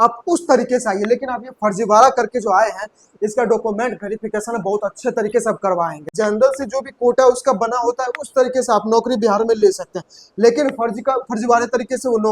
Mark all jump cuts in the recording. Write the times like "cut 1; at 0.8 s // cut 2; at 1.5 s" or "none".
cut 1; at 6.1 s